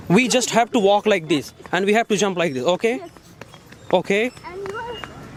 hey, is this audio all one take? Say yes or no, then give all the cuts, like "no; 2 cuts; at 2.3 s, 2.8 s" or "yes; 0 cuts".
yes; 0 cuts